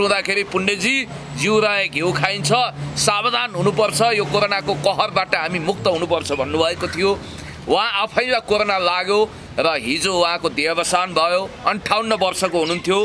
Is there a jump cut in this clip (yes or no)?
no